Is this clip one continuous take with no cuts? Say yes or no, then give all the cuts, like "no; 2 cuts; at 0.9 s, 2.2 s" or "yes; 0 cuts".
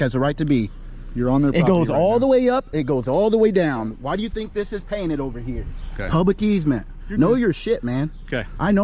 yes; 0 cuts